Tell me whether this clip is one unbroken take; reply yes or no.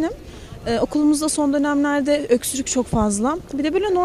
yes